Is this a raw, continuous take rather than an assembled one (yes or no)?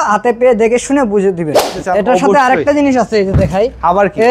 no